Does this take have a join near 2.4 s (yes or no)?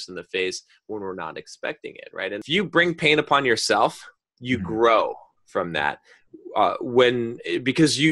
yes